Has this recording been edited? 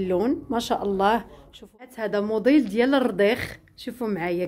yes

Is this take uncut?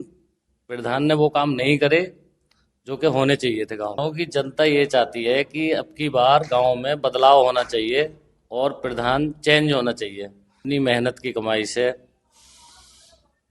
no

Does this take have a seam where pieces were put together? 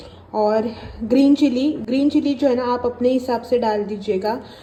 no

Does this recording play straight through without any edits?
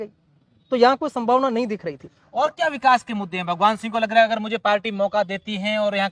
yes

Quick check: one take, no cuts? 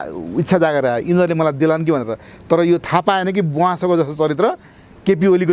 yes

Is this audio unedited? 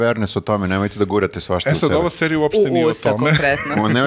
yes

